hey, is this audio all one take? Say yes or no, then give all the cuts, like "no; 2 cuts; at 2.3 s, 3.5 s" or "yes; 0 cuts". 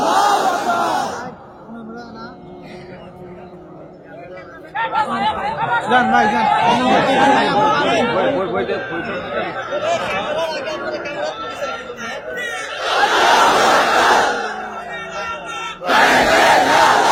yes; 0 cuts